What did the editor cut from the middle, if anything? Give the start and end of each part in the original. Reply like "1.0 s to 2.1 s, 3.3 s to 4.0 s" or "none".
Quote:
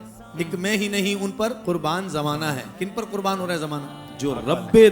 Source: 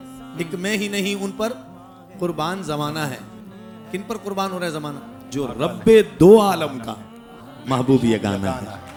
1.6 s to 2.1 s, 3.2 s to 3.8 s